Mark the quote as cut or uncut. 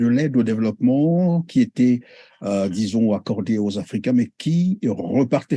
uncut